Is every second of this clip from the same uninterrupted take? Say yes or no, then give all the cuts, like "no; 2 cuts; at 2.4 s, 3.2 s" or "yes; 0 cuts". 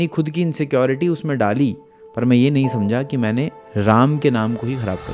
yes; 0 cuts